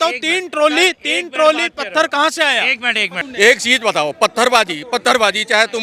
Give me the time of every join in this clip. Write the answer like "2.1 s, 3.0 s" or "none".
3.2 s